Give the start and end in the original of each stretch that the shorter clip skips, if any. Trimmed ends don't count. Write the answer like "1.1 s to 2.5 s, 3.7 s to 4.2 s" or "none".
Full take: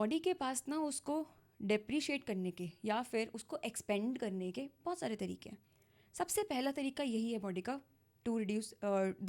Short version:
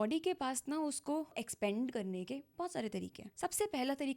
1.4 s to 3.7 s, 5.5 s to 6.0 s